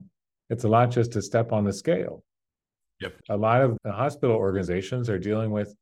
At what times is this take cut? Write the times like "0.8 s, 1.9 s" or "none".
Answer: 3.0 s, 3.7 s